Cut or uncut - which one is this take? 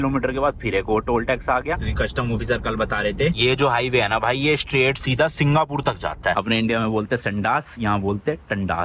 cut